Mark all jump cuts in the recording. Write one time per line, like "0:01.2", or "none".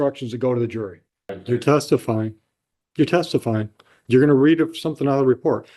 0:01.4